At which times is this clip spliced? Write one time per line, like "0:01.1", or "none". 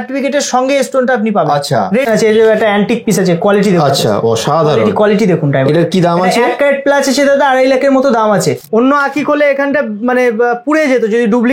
0:02.0
0:08.6